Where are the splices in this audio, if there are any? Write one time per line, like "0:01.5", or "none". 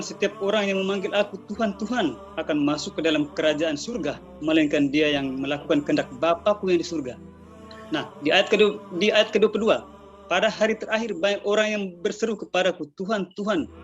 none